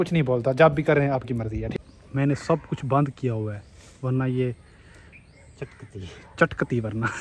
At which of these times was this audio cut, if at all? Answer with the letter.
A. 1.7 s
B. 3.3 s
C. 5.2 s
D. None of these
A